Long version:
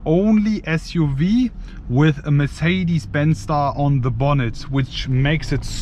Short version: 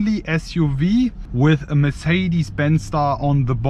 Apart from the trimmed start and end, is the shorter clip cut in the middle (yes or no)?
yes